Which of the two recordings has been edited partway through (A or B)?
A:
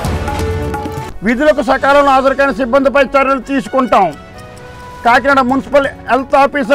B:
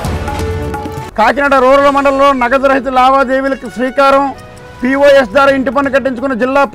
A